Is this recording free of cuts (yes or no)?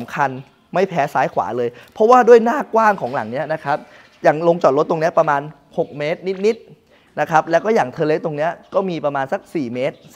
yes